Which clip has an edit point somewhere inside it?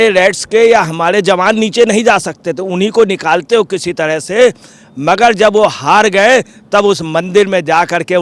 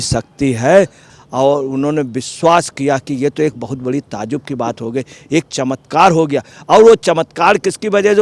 second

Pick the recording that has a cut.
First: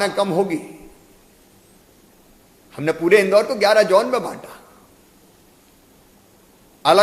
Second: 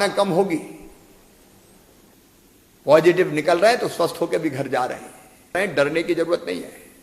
second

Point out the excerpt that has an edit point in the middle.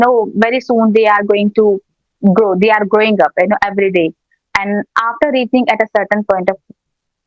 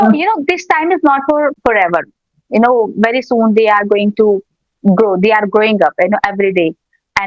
second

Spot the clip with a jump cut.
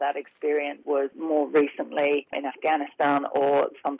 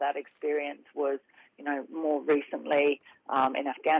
first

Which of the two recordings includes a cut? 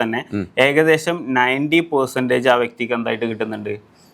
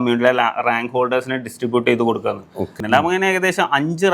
second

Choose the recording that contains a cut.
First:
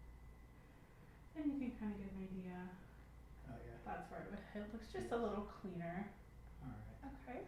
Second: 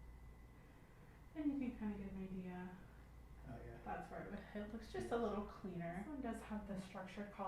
second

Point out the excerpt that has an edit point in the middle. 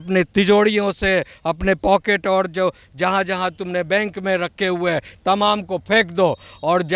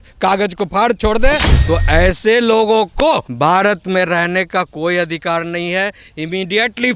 second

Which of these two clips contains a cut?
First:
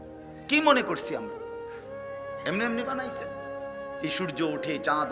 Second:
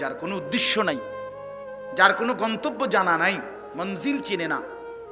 first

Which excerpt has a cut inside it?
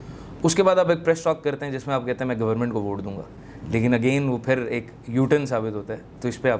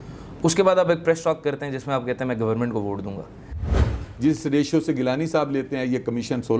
second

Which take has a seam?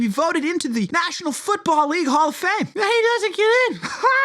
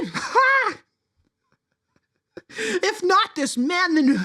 first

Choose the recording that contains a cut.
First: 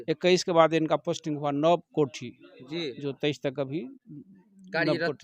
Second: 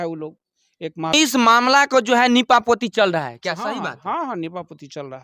second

